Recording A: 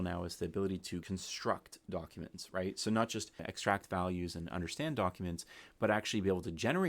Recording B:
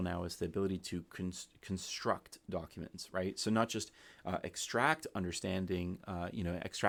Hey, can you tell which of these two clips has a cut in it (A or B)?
A